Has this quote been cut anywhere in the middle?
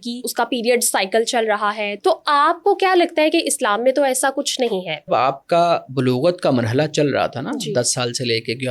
yes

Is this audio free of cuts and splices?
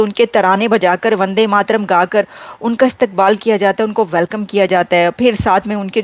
yes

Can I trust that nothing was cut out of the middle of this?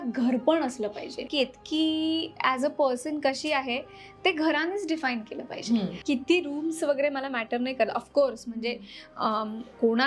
no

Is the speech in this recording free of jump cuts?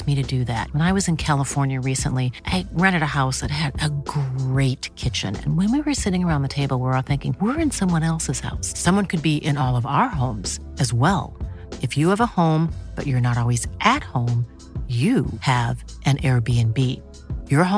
yes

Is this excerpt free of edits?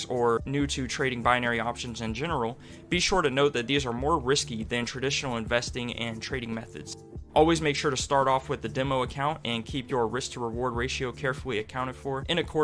yes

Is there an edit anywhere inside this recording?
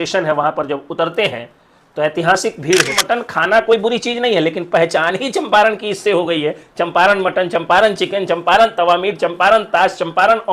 yes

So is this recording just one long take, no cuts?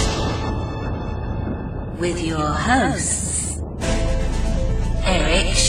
yes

